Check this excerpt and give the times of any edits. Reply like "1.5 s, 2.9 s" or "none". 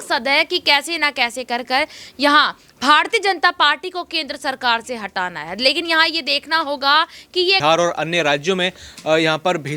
7.6 s